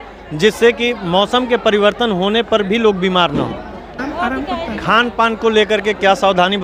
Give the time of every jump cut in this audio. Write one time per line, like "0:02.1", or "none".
0:04.0